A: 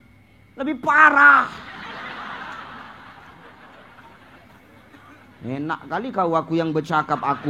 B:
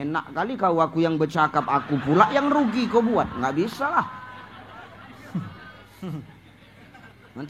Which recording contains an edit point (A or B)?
B